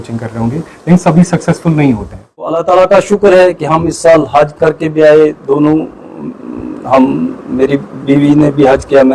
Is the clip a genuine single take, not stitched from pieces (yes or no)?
no